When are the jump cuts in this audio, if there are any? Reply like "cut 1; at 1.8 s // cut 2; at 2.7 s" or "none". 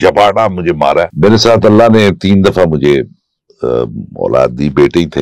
cut 1; at 1.1 s